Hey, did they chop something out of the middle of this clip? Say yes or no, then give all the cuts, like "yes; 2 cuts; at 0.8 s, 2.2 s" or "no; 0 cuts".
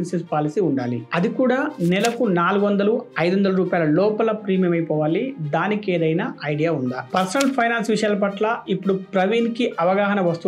yes; 1 cut; at 7.1 s